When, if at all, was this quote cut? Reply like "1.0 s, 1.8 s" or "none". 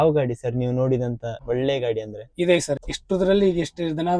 1.3 s, 2.9 s